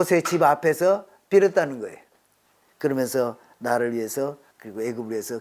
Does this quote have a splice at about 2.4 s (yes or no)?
no